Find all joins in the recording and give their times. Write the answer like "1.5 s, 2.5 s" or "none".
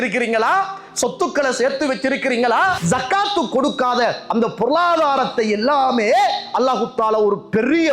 2.8 s